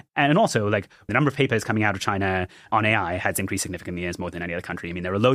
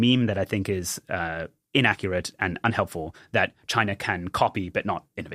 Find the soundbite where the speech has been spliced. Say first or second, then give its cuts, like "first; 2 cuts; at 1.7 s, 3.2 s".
first; 2 cuts; at 1.1 s, 2.7 s